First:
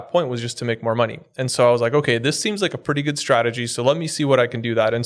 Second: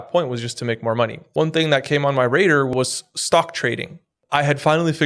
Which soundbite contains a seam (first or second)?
second